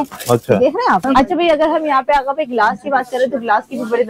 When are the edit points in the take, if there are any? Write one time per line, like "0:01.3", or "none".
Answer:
0:01.3